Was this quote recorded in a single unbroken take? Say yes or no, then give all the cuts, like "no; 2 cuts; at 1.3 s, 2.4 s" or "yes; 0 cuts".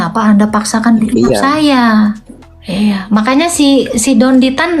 no; 1 cut; at 2.3 s